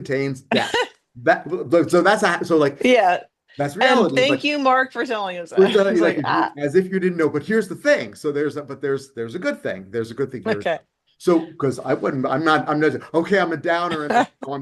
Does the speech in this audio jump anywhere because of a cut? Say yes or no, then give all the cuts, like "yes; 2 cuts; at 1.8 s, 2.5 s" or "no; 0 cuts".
no; 0 cuts